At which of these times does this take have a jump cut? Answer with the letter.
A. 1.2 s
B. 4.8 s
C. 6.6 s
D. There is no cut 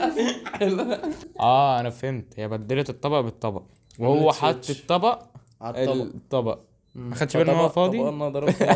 A